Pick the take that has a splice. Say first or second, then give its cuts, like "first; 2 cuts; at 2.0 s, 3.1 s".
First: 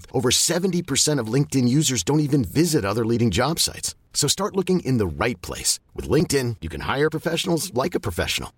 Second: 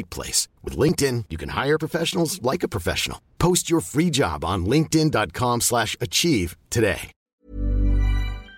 second; 1 cut; at 7.2 s